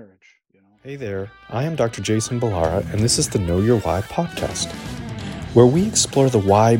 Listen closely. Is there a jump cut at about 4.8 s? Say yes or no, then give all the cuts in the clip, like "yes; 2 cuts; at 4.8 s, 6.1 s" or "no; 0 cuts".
no; 1 cut; at 1.0 s